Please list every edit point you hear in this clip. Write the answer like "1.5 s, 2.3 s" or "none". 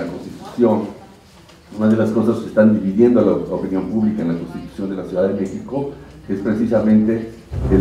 4.8 s